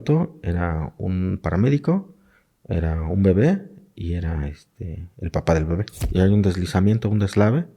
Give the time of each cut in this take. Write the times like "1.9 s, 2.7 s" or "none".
6.0 s